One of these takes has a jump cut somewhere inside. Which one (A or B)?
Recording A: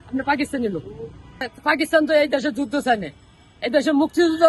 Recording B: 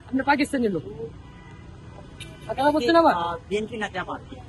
A